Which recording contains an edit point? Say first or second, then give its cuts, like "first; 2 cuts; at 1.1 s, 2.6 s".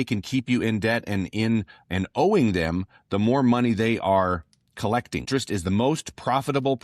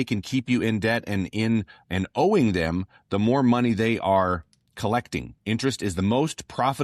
first; 1 cut; at 5.3 s